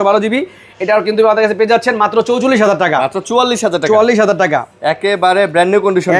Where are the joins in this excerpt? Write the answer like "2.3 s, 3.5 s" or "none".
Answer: none